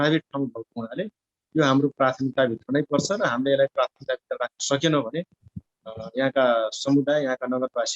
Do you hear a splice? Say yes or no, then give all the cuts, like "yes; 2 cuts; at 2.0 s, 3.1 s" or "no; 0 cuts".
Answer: no; 0 cuts